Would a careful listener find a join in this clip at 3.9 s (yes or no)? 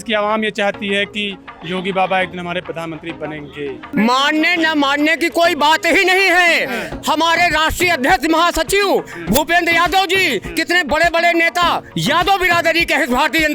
yes